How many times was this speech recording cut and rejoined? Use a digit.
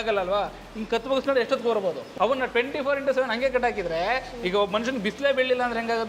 1